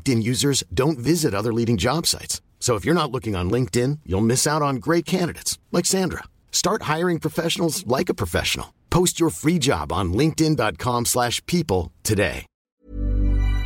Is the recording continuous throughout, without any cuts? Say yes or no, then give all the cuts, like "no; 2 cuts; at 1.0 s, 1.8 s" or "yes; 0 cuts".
no; 1 cut; at 12.5 s